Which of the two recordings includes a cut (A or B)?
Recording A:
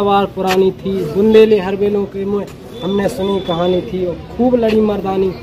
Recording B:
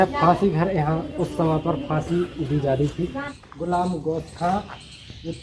B